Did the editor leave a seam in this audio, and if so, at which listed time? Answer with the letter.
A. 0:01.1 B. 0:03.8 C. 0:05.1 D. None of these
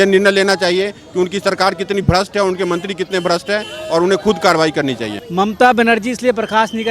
C